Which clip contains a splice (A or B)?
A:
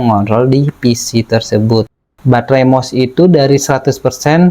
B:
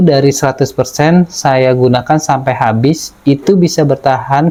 A